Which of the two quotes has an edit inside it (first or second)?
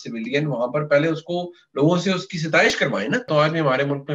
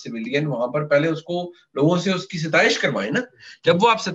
first